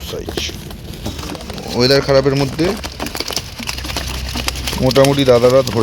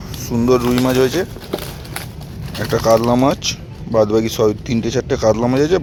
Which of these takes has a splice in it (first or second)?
first